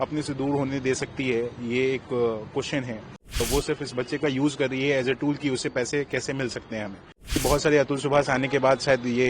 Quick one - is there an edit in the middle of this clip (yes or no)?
yes